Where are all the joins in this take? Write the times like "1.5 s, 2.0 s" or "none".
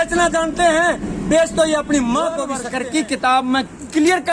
2.7 s